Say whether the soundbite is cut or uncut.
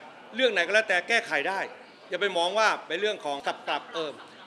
cut